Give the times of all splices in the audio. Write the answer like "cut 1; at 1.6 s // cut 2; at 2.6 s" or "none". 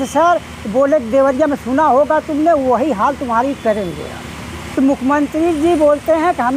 cut 1; at 4.6 s